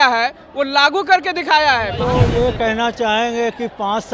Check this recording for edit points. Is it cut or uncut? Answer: cut